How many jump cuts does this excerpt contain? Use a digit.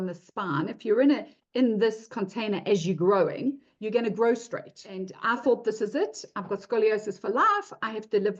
1